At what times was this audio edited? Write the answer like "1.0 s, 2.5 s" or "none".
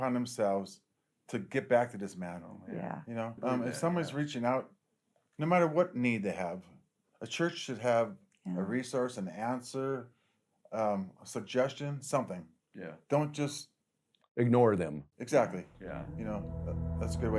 3.3 s